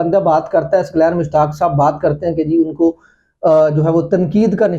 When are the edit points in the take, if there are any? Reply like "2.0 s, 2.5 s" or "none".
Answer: none